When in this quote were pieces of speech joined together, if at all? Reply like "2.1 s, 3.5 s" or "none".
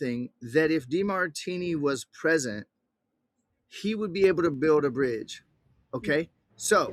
none